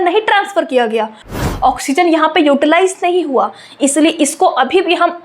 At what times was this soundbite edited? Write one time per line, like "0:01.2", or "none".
0:01.2